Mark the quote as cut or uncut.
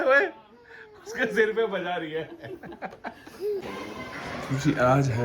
cut